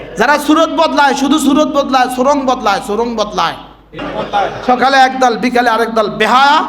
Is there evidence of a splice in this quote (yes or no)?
yes